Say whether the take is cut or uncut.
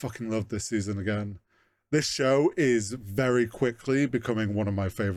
uncut